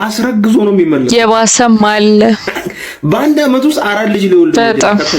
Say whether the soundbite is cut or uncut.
uncut